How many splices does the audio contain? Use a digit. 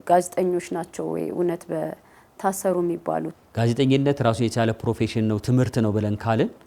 1